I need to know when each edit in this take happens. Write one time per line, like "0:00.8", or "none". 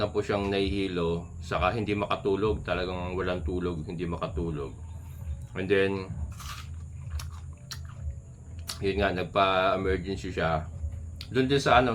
none